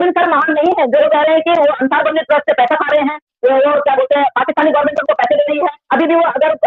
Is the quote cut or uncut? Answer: cut